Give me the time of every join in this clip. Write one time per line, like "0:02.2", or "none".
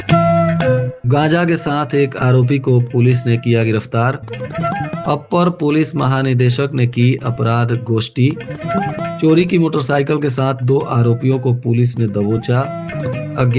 0:00.9